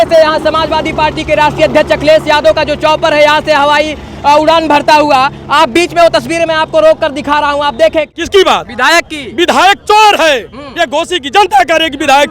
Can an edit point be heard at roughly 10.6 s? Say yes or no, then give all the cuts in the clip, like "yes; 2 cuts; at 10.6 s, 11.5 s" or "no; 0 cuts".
no; 1 cut; at 8.1 s